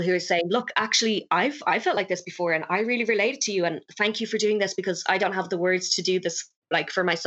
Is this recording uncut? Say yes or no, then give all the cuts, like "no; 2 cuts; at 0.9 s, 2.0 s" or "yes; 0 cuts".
yes; 0 cuts